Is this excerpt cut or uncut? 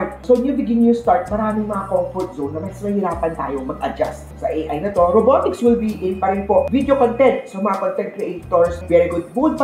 uncut